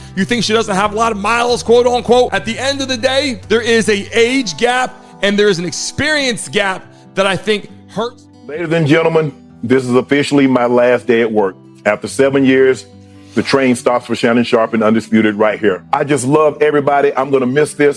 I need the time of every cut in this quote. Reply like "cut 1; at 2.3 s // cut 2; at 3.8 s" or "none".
cut 1; at 8.3 s